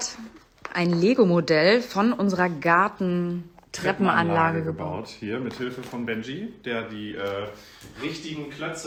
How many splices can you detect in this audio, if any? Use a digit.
0